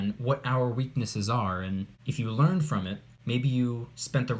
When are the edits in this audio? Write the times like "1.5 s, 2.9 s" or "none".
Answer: 2.0 s, 3.1 s